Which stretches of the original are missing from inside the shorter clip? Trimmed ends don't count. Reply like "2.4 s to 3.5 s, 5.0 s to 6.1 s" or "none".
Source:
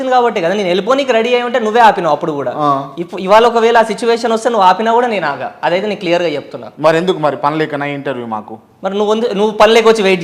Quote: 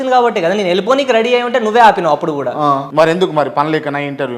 2.8 s to 6.7 s